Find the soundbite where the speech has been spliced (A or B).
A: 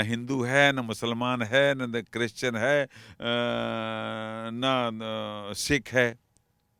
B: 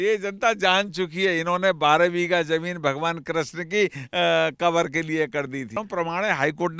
B